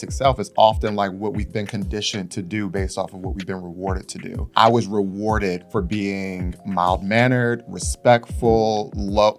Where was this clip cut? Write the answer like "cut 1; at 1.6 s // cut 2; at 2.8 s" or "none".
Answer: cut 1; at 4.4 s